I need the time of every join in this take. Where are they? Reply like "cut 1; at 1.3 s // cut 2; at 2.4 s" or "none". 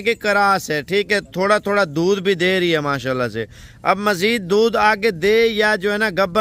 none